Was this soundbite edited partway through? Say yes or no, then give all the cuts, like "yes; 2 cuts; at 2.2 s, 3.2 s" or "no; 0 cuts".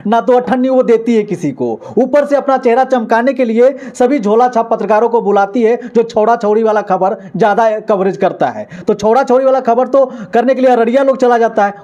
no; 0 cuts